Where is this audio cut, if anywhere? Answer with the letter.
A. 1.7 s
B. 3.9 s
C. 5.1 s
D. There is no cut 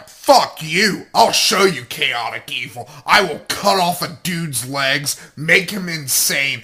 B